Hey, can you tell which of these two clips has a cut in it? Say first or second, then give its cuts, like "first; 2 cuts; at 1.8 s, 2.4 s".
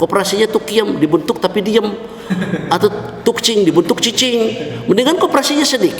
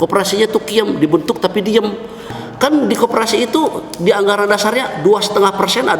second; 1 cut; at 2.2 s